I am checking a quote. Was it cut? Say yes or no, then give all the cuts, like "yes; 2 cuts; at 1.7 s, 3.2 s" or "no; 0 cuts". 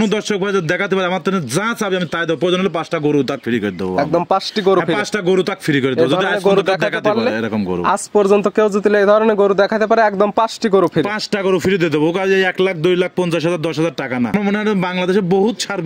yes; 1 cut; at 14.3 s